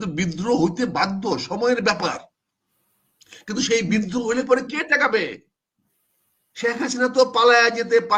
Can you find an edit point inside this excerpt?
no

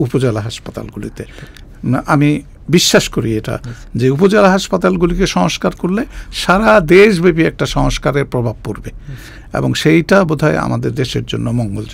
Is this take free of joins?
yes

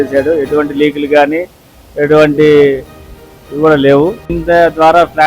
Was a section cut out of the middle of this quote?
yes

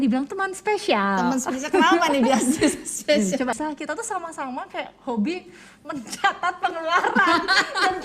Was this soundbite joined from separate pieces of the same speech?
yes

